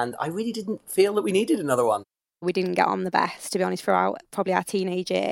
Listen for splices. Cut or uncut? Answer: cut